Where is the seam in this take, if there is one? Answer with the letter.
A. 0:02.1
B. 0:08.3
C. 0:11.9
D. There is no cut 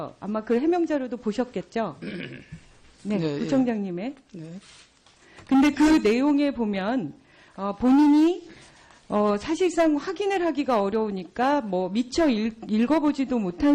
A